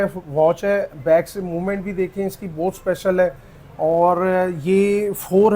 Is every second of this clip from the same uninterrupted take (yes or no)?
yes